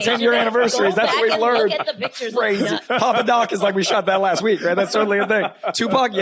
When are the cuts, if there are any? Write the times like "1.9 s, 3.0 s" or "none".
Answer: none